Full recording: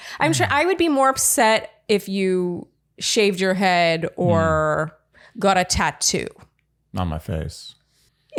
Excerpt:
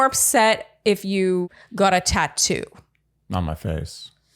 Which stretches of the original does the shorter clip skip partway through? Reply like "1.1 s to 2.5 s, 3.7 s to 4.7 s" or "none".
2.6 s to 5.2 s